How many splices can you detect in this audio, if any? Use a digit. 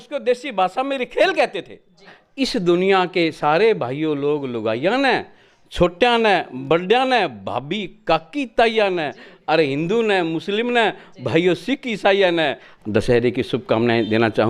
2